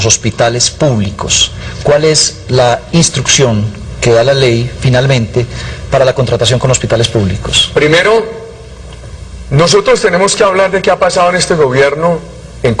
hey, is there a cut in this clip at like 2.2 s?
no; 0 cuts

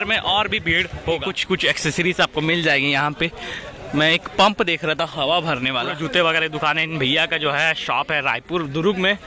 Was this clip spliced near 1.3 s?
yes; 2 cuts; at 1.3 s, 6.0 s

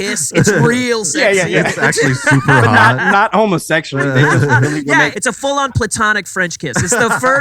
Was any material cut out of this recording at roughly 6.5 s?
no; 1 cut; at 5.1 s

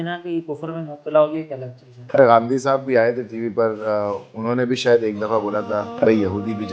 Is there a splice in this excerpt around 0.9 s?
no; 2 cuts; at 2.1 s, 6.0 s

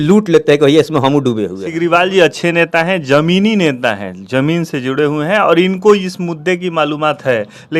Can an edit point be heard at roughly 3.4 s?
no; 1 cut; at 1.6 s

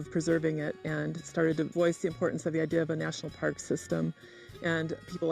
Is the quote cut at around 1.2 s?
yes; 1 cut; at 1.2 s

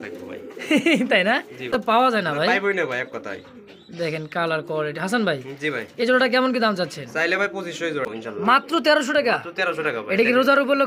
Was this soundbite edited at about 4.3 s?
no; 2 cuts; at 1.8 s, 8.1 s

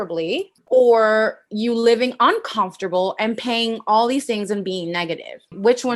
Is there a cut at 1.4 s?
no; 0 cuts

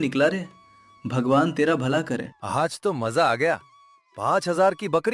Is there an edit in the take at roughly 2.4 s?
yes; 1 cut; at 2.4 s

